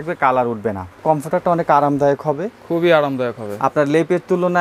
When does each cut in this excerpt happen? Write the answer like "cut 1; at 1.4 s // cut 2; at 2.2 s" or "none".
cut 1; at 1.0 s